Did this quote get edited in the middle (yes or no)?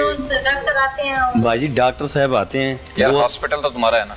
no